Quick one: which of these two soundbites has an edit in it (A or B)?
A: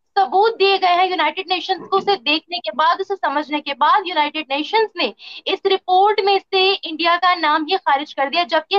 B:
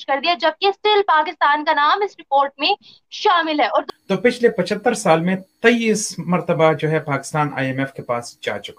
B